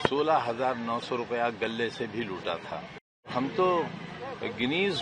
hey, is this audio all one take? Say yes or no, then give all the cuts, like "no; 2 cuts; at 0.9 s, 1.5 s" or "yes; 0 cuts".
no; 1 cut; at 3.3 s